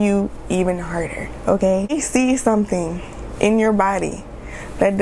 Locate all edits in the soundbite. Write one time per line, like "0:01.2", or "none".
0:01.9

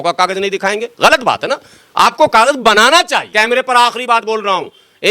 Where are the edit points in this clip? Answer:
0:03.3

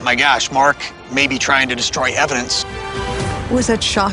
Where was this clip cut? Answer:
0:03.0

